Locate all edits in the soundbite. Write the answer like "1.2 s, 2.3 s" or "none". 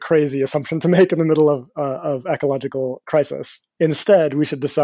none